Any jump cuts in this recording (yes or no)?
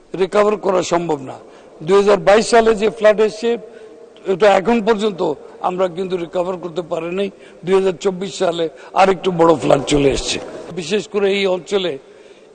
yes